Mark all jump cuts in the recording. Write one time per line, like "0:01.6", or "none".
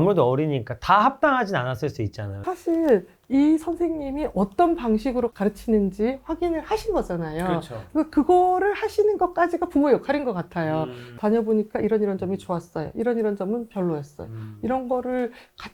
0:02.4
0:11.0